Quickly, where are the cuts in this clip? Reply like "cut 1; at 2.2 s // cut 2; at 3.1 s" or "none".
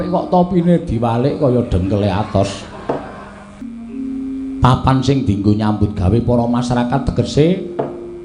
cut 1; at 3.7 s